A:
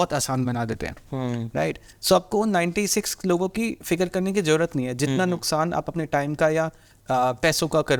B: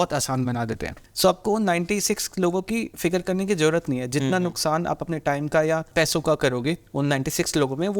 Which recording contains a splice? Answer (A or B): B